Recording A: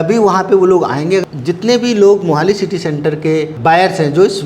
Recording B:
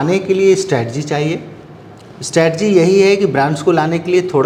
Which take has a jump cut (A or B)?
A